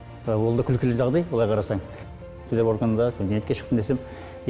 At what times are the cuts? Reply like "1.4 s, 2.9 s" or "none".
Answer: 2.4 s